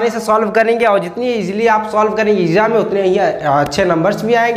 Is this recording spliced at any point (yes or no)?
no